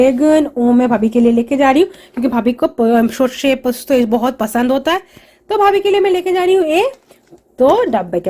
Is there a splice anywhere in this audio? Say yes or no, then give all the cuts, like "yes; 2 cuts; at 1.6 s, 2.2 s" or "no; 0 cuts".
no; 0 cuts